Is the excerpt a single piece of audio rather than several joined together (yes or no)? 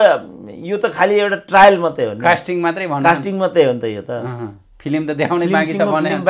yes